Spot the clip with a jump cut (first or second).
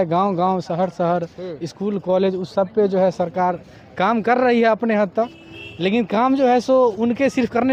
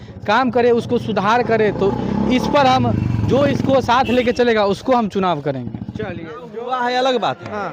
second